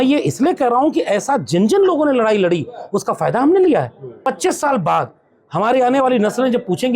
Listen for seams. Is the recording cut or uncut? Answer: cut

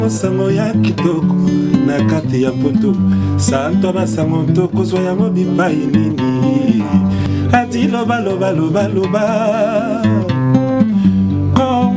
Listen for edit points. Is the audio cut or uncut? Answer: cut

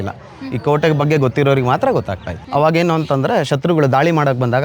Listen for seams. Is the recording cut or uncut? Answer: cut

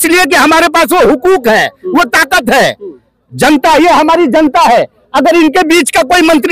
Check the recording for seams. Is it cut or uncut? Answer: uncut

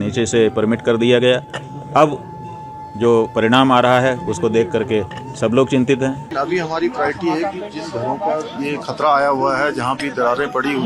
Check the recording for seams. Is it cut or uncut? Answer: cut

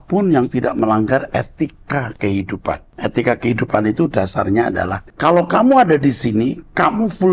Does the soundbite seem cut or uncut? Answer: cut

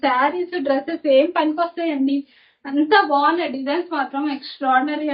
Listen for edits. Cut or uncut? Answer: uncut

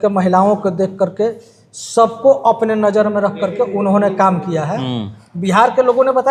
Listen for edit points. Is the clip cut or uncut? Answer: cut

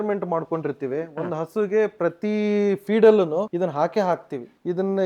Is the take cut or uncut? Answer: cut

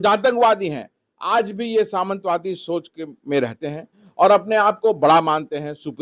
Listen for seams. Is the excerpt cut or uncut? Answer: uncut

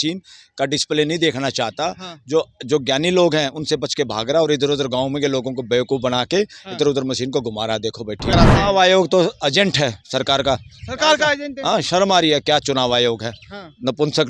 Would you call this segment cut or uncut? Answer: cut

